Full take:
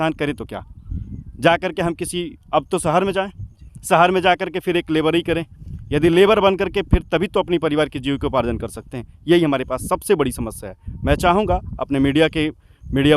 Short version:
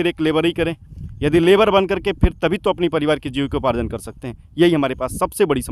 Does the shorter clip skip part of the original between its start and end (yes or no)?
no